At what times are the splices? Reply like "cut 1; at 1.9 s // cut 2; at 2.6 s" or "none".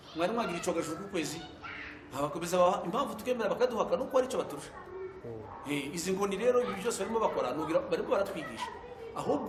none